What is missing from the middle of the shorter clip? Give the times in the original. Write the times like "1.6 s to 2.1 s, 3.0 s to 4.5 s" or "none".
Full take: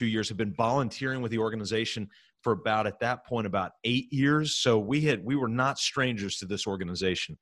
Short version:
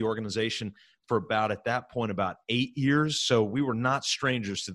4.9 s to 5.3 s

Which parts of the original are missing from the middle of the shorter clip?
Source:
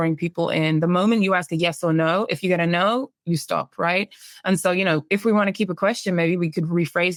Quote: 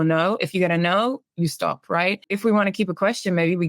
4.2 s to 5.1 s

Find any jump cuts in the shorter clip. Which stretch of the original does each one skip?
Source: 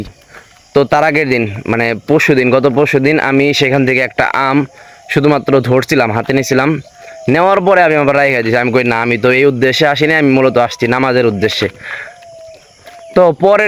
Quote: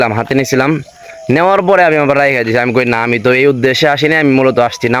none

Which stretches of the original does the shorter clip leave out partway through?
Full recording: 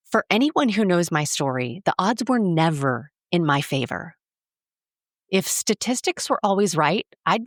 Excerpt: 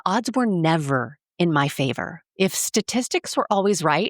4.1 s to 5.1 s

